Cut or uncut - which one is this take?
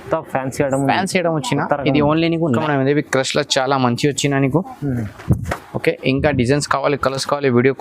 cut